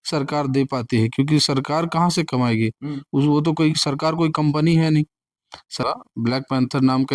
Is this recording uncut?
no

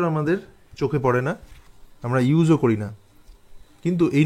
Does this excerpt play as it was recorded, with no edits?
yes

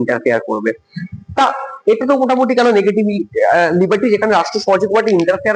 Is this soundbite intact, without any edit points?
yes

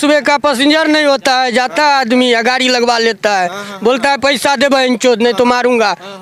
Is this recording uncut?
yes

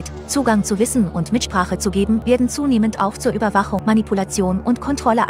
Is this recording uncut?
no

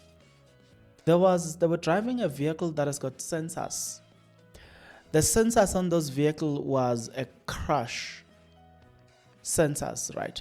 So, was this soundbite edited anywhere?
yes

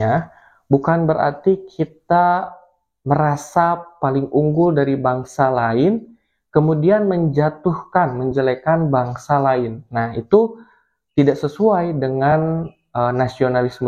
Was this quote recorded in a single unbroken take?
yes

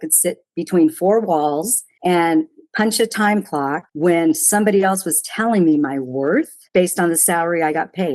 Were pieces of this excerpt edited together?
yes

